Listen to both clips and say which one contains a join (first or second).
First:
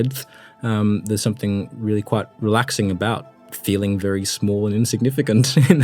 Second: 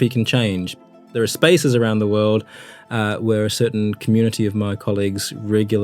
second